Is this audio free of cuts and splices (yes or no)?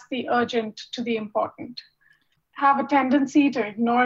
yes